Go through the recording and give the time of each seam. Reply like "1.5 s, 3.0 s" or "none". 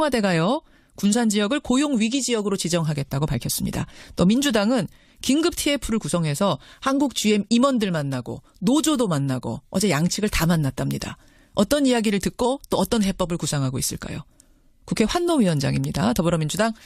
2.3 s